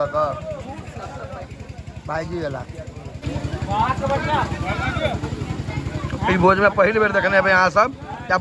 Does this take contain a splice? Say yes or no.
yes